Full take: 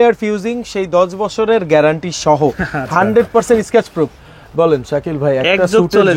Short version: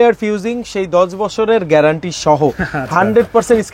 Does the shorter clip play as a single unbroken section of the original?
yes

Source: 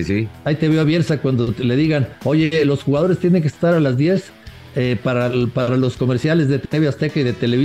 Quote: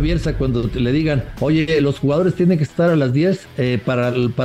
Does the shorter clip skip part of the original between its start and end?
yes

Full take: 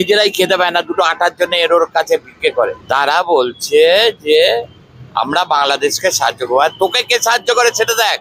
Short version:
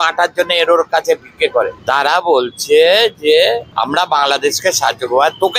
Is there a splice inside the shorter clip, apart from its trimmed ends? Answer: yes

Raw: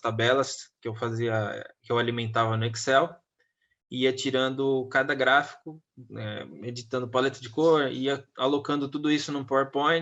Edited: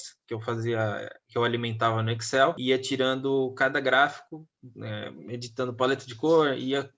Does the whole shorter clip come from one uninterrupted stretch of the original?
no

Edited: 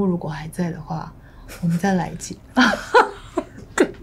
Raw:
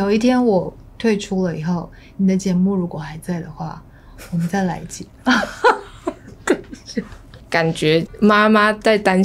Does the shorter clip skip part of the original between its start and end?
no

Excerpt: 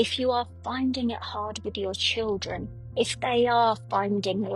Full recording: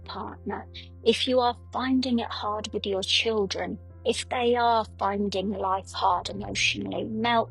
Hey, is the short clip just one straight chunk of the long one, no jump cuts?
yes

